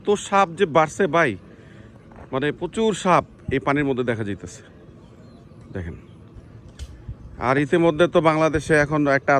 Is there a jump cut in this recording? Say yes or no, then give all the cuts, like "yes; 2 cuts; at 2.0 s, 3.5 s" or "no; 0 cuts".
no; 0 cuts